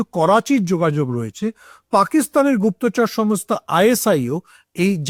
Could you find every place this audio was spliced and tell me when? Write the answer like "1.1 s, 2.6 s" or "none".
none